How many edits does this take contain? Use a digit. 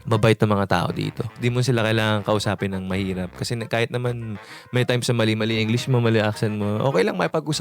1